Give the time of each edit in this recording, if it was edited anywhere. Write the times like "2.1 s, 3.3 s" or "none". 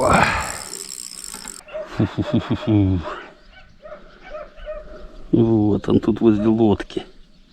1.6 s